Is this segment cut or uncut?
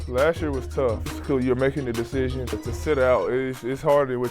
cut